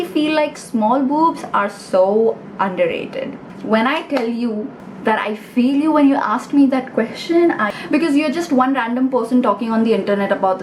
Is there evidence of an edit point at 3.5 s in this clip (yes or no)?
yes